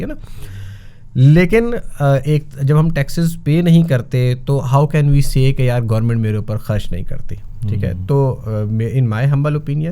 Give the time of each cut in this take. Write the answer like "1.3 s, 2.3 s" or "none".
none